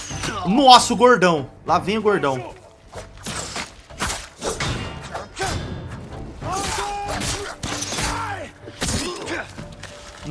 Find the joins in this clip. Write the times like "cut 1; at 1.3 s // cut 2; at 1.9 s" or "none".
none